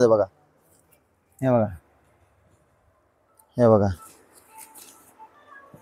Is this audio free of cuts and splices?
yes; 0 cuts

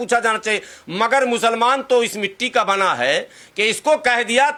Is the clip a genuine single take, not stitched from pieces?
yes; 0 cuts

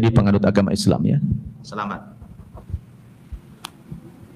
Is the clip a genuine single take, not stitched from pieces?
yes; 0 cuts

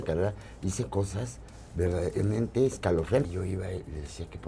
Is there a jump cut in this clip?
yes; 1 cut; at 3.3 s

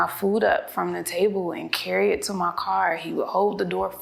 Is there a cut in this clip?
no; 0 cuts

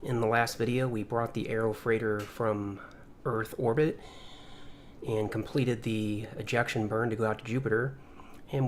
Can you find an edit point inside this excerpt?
yes; 1 cut; at 4.5 s

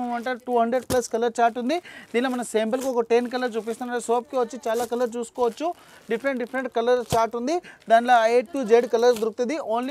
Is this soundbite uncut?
yes; 0 cuts

